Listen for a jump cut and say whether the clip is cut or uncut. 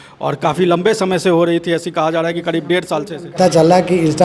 cut